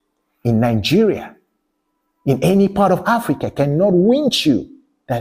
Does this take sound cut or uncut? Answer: uncut